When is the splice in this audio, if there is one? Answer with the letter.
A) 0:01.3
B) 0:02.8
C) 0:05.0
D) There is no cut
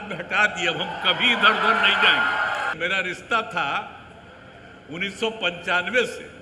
B